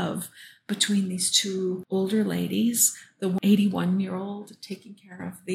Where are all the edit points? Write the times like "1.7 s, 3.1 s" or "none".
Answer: 1.8 s, 3.4 s